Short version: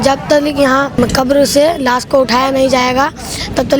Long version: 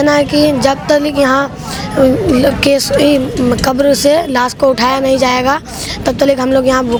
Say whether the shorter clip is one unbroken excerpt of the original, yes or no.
no